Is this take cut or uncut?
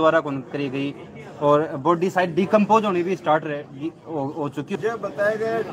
cut